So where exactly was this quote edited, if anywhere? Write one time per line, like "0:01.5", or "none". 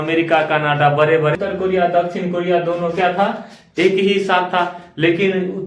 0:01.4